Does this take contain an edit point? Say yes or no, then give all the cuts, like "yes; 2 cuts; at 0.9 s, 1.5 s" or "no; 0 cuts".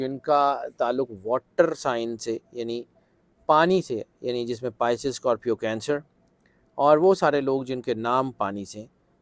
no; 0 cuts